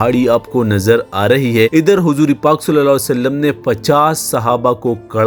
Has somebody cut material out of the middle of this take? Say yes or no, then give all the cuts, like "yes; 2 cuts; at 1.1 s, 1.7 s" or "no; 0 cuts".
no; 0 cuts